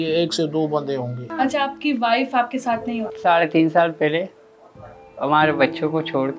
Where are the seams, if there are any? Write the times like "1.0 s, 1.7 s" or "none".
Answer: 1.2 s, 3.1 s